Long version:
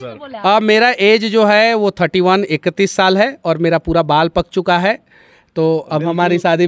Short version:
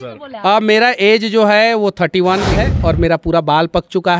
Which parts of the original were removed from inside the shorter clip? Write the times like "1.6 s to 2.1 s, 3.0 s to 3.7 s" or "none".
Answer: 2.6 s to 3.2 s